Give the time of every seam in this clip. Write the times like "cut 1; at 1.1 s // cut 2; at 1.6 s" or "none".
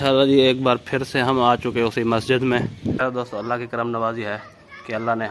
cut 1; at 3.0 s